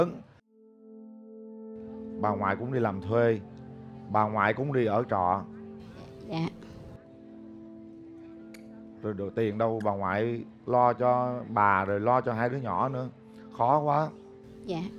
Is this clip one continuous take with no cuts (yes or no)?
yes